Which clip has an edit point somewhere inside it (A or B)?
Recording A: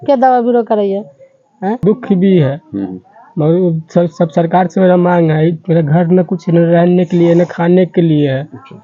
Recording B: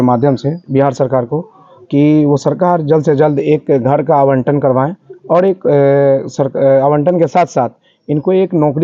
A